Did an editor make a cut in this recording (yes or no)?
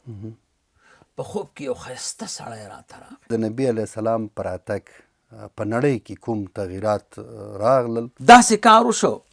yes